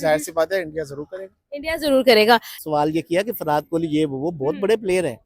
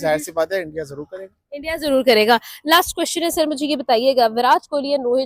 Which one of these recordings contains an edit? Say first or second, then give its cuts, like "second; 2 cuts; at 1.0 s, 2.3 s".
first; 1 cut; at 2.5 s